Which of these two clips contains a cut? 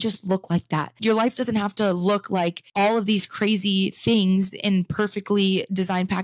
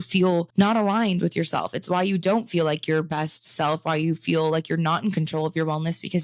first; 2 cuts; at 1.0 s, 2.6 s

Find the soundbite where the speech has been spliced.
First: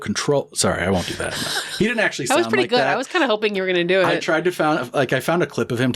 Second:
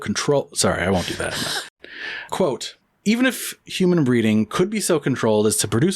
second; 1 cut; at 1.7 s

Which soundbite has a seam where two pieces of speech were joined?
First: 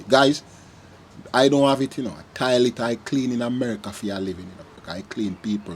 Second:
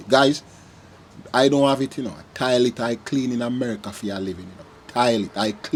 first; 1 cut; at 4.7 s

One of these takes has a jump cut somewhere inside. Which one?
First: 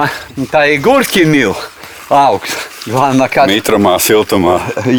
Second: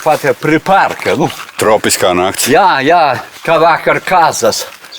second; 1 cut; at 3.3 s

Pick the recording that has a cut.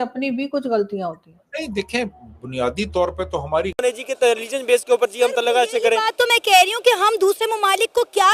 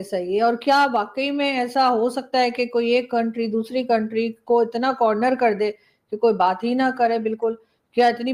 first; 1 cut; at 3.8 s

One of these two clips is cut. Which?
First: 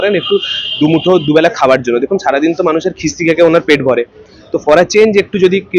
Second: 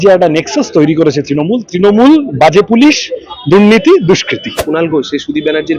second; 1 cut; at 4.6 s

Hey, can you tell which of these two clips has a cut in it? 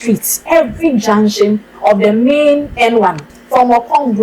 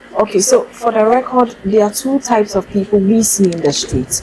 first; 1 cut; at 3.3 s

